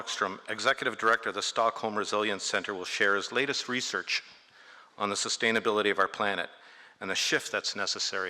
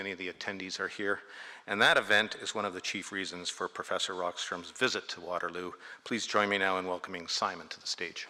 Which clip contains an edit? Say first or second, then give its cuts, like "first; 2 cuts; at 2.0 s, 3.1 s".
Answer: first; 1 cut; at 5.5 s